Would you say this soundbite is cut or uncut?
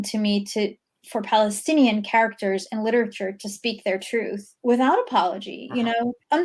uncut